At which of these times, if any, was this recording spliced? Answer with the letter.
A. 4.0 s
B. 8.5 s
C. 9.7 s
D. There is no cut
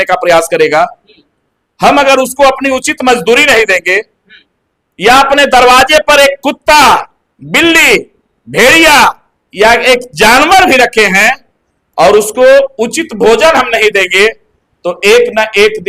D